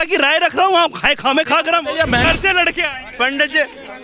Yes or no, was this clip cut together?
yes